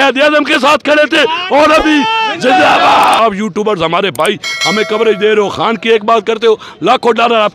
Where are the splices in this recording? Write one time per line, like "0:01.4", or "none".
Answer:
0:03.2